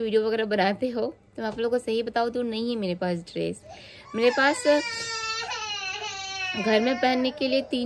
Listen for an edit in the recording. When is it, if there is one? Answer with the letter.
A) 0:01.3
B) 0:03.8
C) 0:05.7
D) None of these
D